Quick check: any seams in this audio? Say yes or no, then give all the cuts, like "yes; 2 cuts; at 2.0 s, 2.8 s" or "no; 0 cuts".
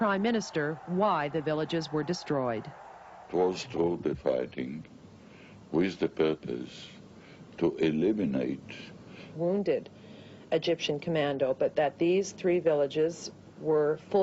no; 0 cuts